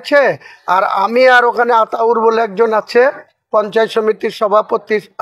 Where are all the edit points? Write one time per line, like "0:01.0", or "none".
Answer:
none

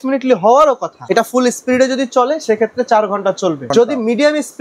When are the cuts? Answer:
0:01.0
0:03.7

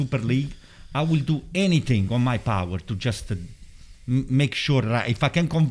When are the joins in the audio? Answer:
none

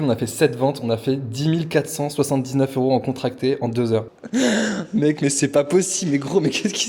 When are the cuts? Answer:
0:04.2

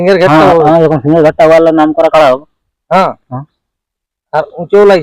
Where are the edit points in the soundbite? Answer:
none

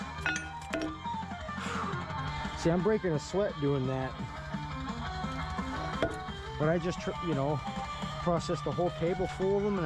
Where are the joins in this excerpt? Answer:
none

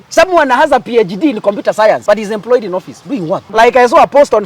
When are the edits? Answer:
0:02.0
0:03.5

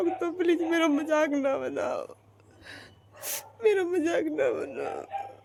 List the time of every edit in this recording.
none

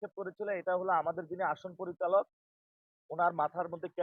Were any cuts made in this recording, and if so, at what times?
none

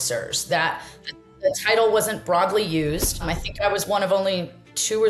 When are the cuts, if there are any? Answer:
0:03.3

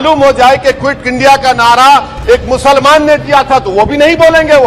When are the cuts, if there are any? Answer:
none

